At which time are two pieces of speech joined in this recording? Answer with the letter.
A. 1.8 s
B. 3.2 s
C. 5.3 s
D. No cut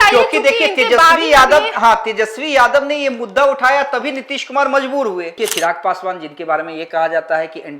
C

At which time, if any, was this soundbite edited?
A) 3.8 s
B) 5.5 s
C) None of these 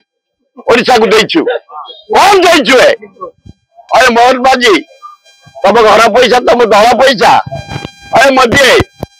A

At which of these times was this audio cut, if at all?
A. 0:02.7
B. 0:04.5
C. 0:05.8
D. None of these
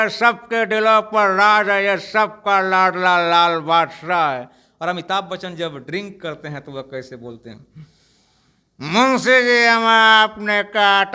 D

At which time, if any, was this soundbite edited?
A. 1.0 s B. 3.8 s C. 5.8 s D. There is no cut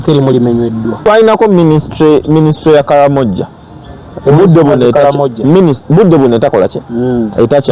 A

